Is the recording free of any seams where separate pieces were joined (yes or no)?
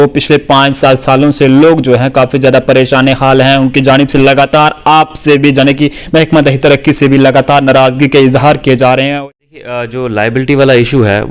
no